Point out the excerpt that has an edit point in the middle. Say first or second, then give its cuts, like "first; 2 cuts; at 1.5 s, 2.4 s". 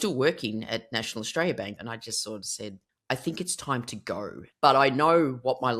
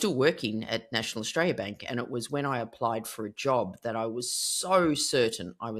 first; 3 cuts; at 1.8 s, 2.9 s, 4.4 s